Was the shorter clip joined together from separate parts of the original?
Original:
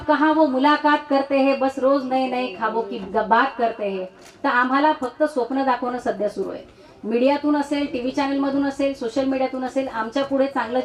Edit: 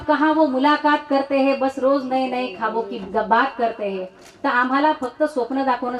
no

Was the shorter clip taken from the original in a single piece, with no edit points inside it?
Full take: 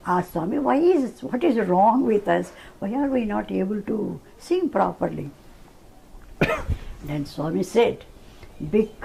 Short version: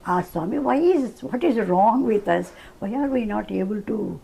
yes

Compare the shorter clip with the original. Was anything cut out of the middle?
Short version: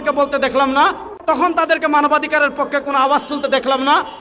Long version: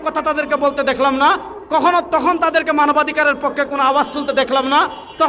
yes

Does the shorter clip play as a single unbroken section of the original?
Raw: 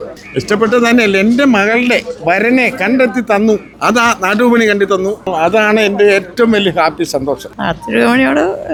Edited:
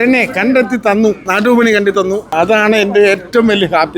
no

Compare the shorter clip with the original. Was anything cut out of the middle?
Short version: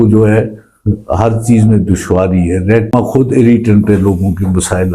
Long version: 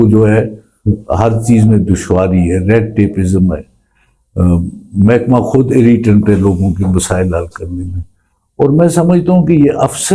yes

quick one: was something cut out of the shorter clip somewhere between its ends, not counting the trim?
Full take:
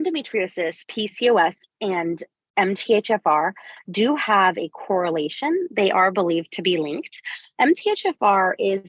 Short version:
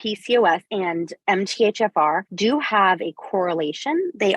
yes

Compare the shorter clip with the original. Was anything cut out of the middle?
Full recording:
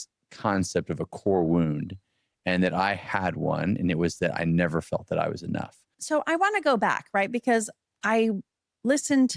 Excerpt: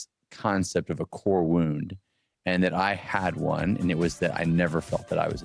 no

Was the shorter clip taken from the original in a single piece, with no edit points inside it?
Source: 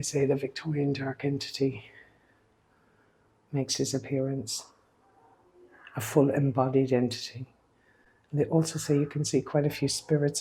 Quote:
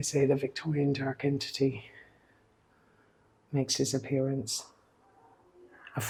yes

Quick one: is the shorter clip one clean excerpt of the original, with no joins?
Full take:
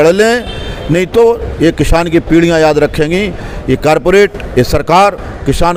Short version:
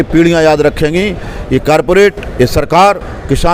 yes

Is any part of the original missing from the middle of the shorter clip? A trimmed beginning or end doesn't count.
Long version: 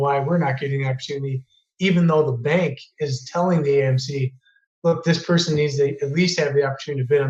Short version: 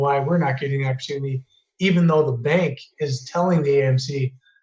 no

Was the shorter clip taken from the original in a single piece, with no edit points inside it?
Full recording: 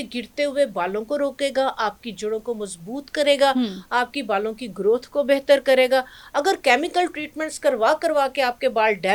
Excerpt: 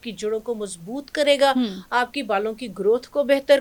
yes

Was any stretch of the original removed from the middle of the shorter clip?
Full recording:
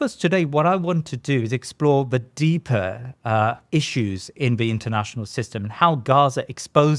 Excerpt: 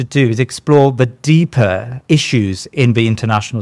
yes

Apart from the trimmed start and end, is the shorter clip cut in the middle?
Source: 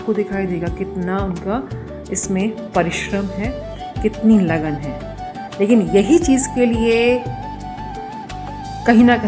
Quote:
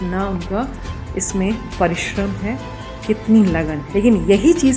yes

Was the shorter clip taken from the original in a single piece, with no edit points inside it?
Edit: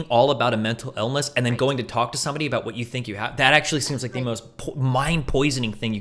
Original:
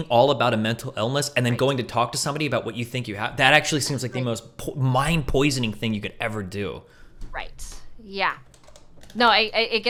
yes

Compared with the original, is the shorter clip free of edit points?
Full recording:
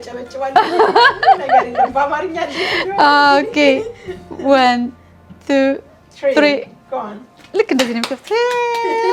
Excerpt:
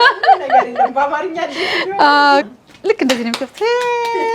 no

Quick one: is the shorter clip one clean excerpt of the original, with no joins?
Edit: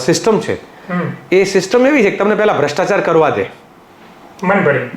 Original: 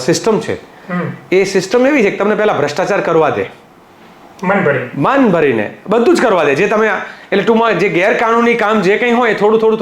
yes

